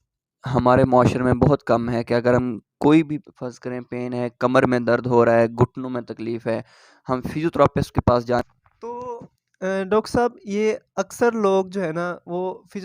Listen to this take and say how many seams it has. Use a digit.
1